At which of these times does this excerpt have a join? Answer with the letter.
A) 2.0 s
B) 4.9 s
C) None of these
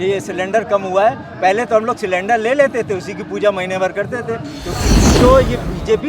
B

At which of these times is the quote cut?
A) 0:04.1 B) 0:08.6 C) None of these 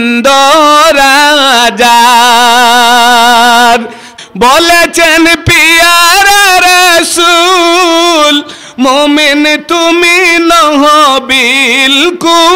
A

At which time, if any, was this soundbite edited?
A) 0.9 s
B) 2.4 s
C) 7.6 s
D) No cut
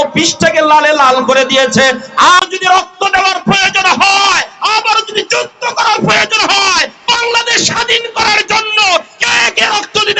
B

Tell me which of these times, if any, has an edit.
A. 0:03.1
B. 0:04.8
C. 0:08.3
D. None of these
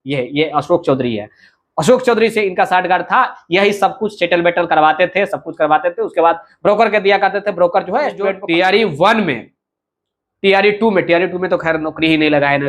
C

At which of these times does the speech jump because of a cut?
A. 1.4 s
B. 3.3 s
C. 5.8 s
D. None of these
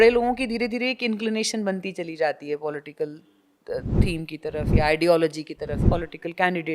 C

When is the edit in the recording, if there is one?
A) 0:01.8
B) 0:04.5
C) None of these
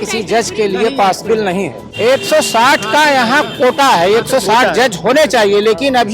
A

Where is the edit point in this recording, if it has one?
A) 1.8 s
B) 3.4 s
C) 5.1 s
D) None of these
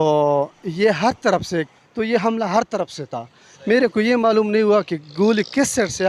A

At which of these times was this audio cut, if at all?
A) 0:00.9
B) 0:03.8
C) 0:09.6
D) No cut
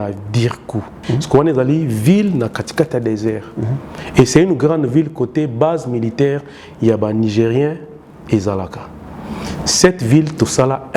A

